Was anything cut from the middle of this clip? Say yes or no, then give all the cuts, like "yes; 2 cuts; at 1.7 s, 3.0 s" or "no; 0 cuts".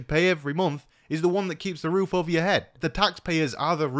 yes; 1 cut; at 2.8 s